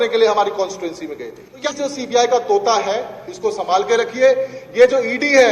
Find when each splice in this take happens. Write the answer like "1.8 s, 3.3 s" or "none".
1.7 s